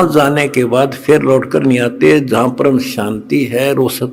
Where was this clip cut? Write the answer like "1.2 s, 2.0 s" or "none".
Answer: none